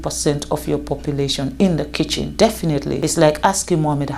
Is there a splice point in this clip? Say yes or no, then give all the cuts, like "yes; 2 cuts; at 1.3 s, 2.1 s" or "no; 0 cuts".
yes; 2 cuts; at 2.2 s, 3.0 s